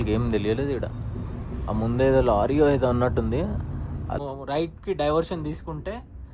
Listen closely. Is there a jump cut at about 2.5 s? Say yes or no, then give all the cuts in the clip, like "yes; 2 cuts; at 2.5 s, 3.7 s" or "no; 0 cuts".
no; 1 cut; at 4.2 s